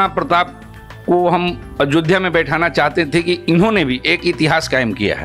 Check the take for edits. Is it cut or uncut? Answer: uncut